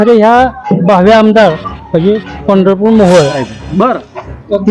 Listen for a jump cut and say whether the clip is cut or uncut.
cut